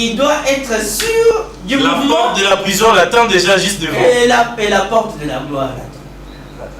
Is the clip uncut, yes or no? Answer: yes